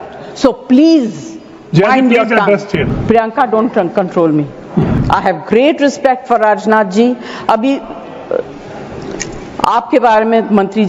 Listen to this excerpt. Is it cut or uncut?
cut